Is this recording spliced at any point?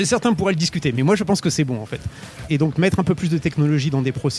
yes; 1 cut; at 2.5 s

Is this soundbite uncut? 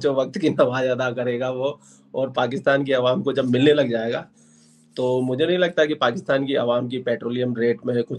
yes; 0 cuts

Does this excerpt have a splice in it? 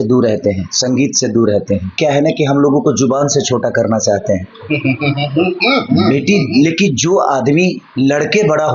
yes; 1 cut; at 1.9 s

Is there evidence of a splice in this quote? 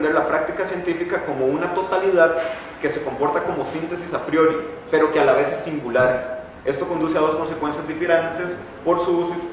no; 0 cuts

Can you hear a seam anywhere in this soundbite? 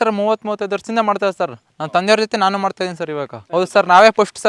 no; 0 cuts

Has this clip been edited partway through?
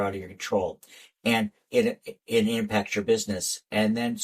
no; 0 cuts

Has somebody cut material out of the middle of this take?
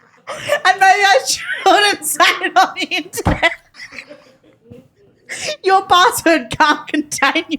yes; 1 cut; at 3.6 s

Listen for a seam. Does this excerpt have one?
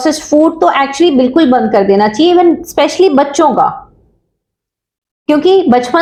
no; 0 cuts

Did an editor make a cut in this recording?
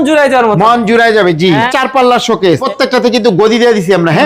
yes; 2 cuts; at 1.7 s, 2.6 s

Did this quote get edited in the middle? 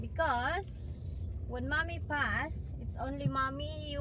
no; 0 cuts

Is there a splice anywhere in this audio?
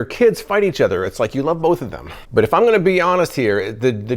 no; 0 cuts

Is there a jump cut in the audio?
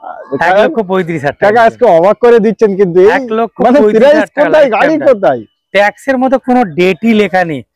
no; 0 cuts

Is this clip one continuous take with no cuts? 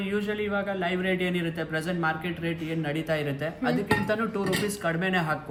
yes; 0 cuts

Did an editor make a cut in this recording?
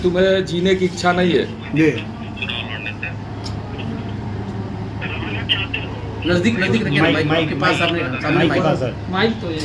no; 0 cuts

